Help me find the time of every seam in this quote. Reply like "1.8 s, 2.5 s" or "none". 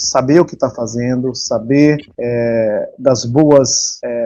none